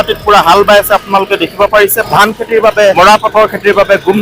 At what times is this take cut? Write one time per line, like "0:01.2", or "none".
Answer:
0:02.0
0:02.9

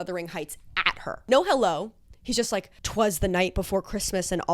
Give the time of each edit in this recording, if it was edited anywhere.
0:02.8

